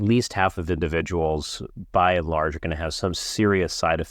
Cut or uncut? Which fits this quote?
uncut